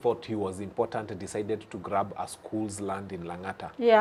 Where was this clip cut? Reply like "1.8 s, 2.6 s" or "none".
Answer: none